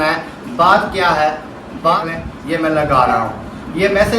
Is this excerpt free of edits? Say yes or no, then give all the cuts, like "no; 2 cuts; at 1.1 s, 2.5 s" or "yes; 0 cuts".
no; 1 cut; at 1.6 s